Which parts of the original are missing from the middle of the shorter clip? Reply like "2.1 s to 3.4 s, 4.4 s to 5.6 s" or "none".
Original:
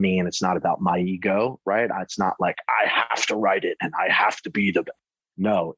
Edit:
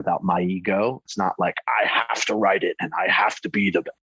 1.6 s to 2.0 s